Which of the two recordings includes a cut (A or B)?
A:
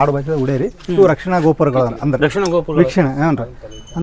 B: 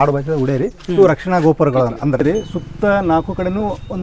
B